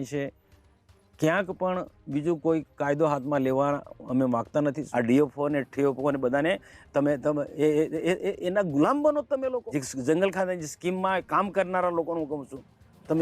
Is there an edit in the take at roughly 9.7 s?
yes; 2 cuts; at 4.8 s, 9.7 s

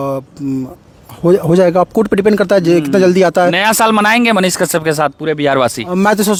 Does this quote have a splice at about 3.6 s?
no; 0 cuts

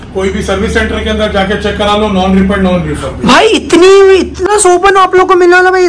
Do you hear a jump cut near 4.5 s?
yes; 1 cut; at 4.5 s

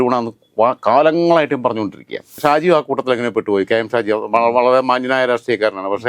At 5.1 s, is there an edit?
no; 1 cut; at 2.3 s

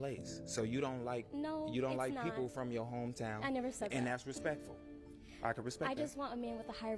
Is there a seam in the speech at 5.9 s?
no; 0 cuts

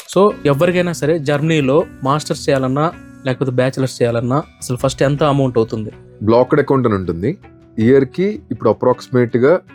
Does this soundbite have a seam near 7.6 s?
no; 0 cuts

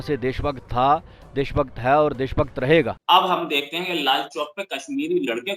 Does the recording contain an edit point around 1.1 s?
no; 1 cut; at 3.0 s

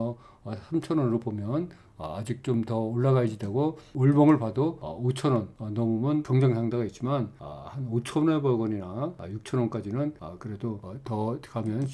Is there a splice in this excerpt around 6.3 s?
yes; 3 cuts; at 3.9 s, 4.9 s, 6.3 s

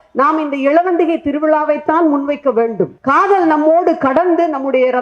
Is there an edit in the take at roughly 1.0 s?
no; 1 cut; at 3.0 s

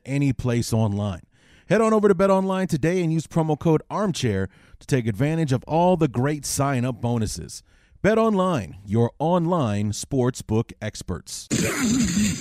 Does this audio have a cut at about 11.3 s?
yes; 1 cut; at 11.3 s

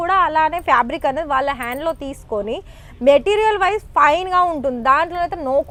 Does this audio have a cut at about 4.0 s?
no; 0 cuts

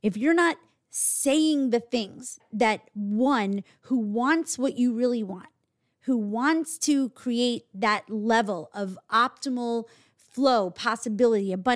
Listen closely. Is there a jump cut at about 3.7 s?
no; 1 cut; at 2.4 s

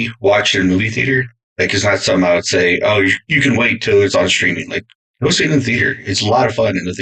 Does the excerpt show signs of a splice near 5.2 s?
no; 0 cuts

